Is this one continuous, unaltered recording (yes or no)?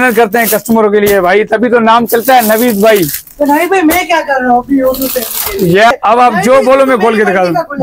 no